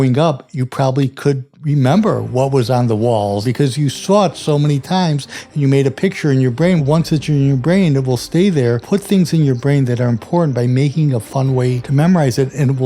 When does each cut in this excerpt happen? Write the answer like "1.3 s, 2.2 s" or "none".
3.4 s, 6.8 s, 8.8 s, 11.8 s